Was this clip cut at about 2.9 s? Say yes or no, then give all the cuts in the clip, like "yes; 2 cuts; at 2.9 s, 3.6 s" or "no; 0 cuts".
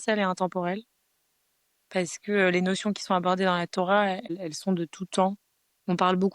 no; 1 cut; at 4.3 s